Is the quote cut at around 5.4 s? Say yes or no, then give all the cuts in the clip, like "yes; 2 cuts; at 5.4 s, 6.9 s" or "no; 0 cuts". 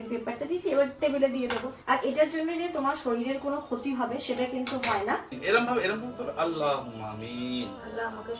yes; 2 cuts; at 1.8 s, 5.4 s